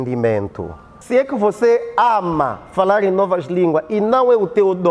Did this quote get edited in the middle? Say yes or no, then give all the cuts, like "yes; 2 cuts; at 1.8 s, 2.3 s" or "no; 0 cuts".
yes; 1 cut; at 0.9 s